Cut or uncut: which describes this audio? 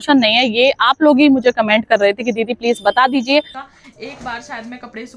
cut